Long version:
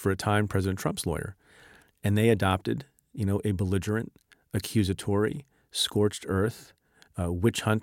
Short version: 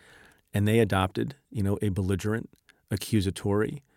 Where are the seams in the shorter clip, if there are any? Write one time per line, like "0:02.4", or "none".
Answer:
0:01.4